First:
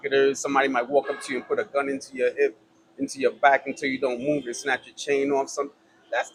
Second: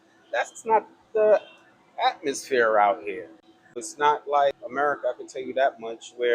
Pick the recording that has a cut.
second; 2 cuts; at 3.9 s, 4.6 s

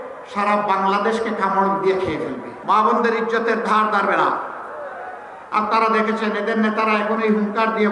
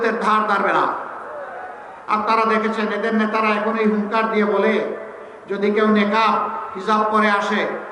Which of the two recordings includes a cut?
first; 1 cut; at 2.5 s

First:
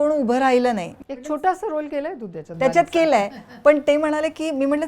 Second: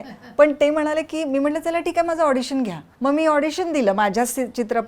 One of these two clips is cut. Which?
first; 1 cut; at 1.0 s

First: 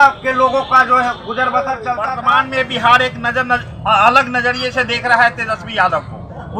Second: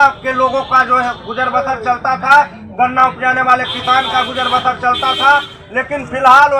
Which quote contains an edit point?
first; 1 cut; at 2.2 s

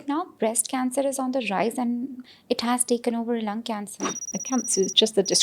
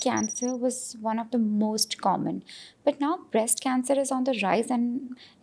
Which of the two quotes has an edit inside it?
first; 1 cut; at 4.4 s

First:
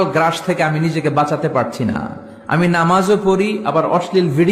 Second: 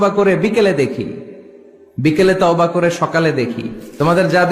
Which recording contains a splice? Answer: second; 1 cut; at 3.3 s

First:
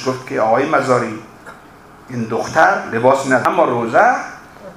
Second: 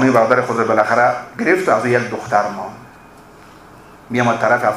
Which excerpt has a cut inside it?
first; 1 cut; at 3.4 s

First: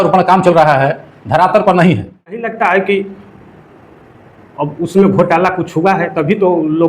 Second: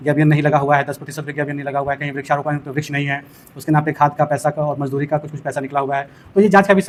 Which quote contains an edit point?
first; 1 cut; at 2.5 s

